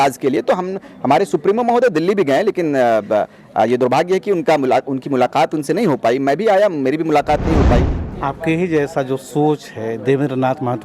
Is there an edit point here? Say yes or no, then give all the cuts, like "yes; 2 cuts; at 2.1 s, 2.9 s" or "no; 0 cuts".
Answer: yes; 1 cut; at 8.0 s